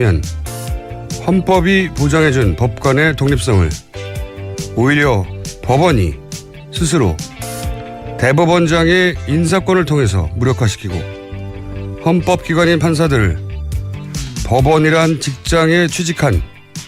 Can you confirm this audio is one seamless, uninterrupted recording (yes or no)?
no